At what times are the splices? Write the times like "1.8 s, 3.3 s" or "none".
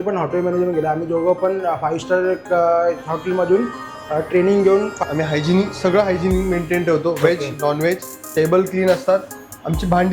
5.0 s